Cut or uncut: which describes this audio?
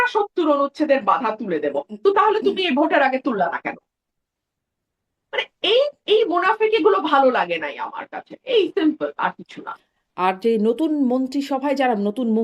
uncut